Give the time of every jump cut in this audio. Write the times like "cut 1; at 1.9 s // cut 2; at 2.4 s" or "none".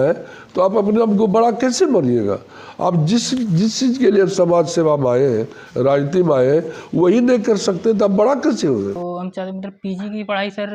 cut 1; at 9.0 s